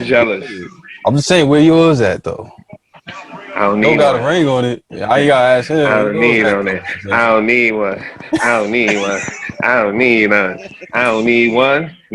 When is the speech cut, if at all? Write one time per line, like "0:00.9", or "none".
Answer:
none

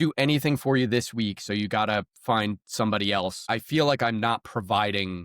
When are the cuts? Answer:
0:03.4

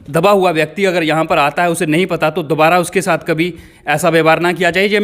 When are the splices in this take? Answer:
none

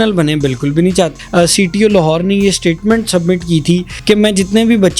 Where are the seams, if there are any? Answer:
0:01.2
0:03.9

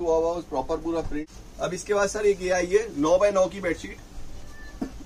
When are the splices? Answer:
0:01.2

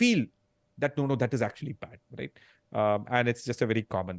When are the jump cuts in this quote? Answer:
none

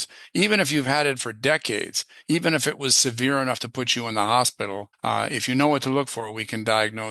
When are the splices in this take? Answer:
none

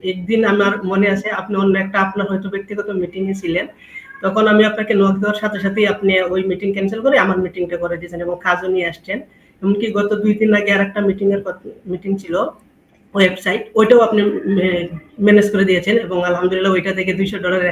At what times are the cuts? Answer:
none

